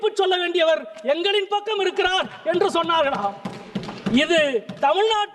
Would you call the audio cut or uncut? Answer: uncut